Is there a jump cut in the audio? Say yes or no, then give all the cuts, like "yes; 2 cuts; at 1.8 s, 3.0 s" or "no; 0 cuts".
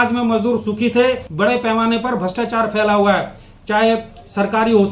yes; 1 cut; at 1.3 s